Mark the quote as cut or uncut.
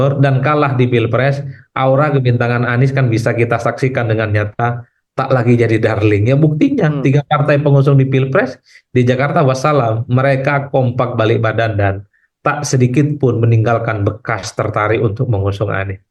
uncut